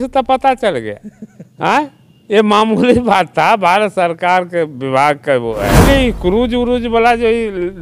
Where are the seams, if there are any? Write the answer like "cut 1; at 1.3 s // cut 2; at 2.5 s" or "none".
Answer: cut 1; at 5.8 s